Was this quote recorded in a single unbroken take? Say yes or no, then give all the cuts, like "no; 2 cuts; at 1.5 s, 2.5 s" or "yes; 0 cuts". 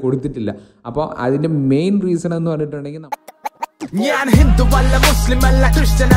no; 1 cut; at 2.8 s